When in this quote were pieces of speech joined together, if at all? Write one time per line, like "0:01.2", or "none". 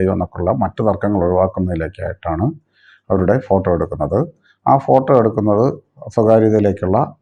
none

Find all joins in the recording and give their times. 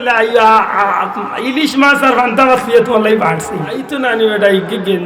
0:03.9

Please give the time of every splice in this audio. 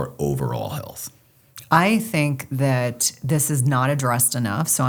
none

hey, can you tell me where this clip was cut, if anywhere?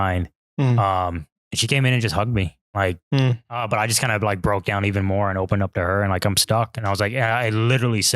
0:03.5

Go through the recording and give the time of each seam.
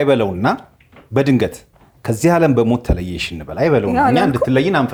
none

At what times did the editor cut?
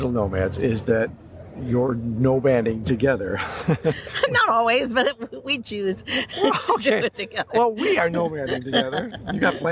none

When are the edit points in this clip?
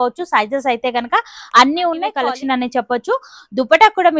0:02.1

